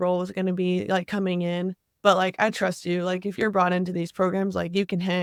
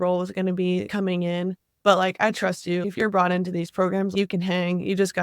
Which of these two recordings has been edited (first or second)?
second